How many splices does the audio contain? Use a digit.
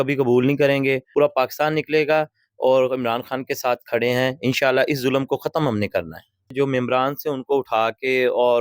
2